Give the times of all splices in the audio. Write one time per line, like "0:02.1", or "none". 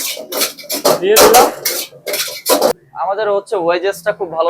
0:02.8